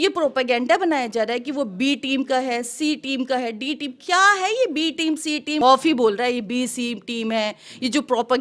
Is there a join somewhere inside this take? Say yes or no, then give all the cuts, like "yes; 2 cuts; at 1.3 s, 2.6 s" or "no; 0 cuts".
yes; 1 cut; at 5.6 s